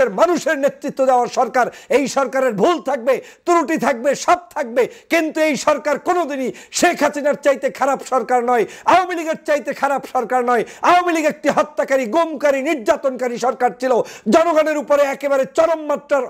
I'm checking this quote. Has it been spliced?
no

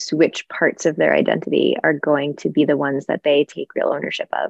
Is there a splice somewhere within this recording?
no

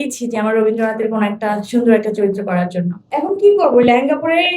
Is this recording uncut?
no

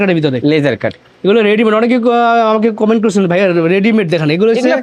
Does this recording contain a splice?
no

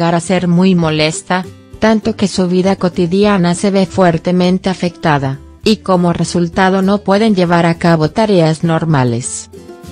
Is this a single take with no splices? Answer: yes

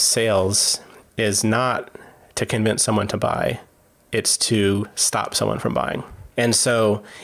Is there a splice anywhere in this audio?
no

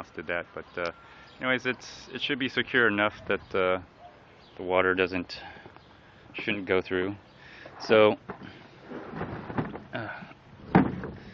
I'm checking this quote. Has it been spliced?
no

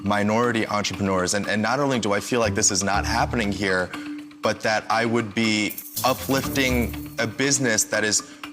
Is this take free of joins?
no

